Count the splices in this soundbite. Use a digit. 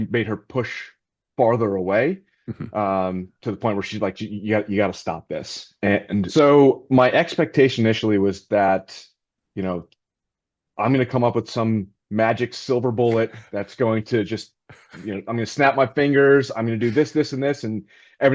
1